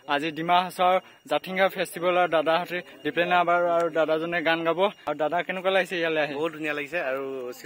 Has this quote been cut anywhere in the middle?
yes; 1 cut; at 5.0 s

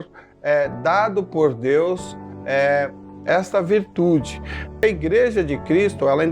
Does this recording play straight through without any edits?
no; 1 cut; at 4.8 s

